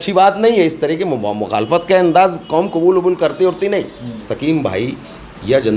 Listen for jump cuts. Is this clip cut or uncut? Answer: cut